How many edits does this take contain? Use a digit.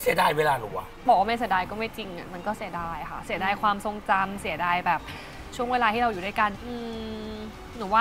2